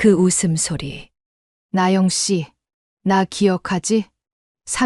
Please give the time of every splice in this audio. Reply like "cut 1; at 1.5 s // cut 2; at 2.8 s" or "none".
cut 1; at 1.5 s